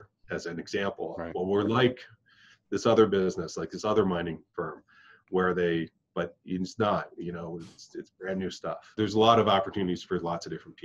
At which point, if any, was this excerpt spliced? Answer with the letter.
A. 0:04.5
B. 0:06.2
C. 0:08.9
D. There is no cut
C